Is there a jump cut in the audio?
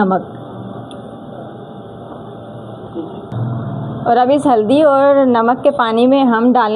yes; 1 cut; at 3.3 s

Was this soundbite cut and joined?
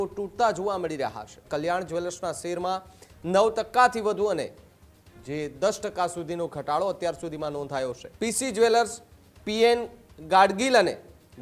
yes; 2 cuts; at 1.4 s, 8.0 s

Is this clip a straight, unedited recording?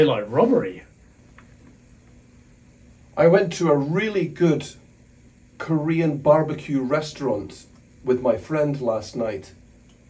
no; 1 cut; at 1.2 s

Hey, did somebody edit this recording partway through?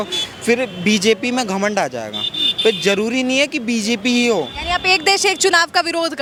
no; 0 cuts

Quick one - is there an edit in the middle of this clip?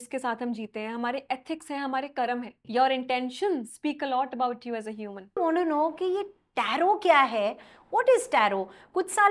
yes; 2 cuts; at 2.6 s, 5.4 s

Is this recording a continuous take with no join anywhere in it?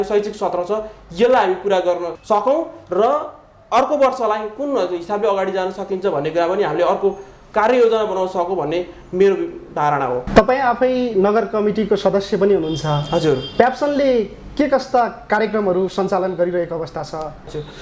yes; 0 cuts

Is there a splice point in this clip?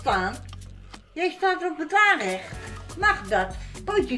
no; 0 cuts

